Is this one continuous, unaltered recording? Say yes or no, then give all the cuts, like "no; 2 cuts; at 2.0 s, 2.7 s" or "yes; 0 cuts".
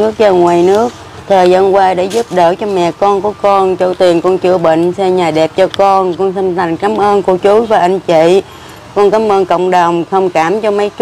yes; 0 cuts